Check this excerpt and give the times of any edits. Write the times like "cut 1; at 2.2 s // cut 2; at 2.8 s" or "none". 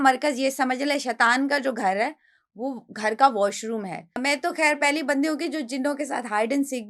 cut 1; at 4.2 s